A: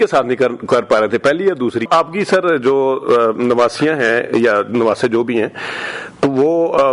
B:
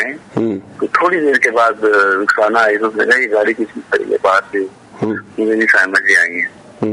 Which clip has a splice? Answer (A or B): A